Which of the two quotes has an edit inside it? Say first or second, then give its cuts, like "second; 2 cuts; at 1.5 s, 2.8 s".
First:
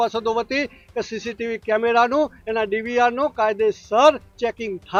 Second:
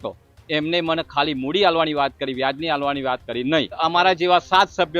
second; 1 cut; at 3.8 s